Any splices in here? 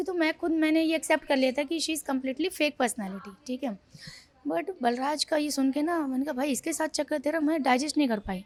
no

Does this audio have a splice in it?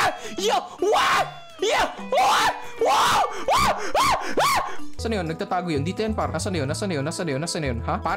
yes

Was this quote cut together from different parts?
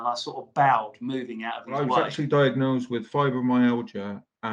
yes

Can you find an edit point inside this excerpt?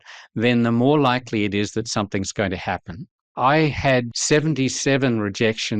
yes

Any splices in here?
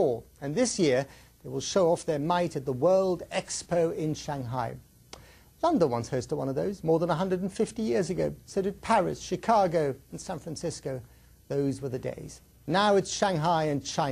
yes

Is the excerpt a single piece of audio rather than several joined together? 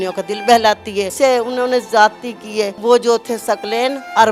no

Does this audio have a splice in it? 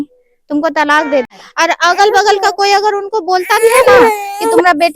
yes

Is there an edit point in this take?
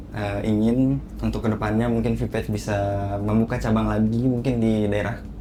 no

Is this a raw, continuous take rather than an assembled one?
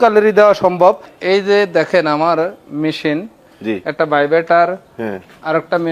no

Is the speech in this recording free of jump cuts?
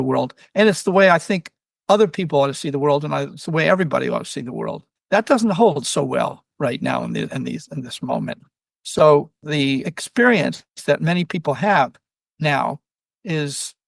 no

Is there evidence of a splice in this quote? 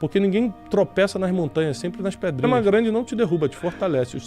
yes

